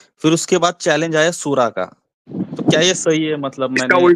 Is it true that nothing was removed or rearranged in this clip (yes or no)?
yes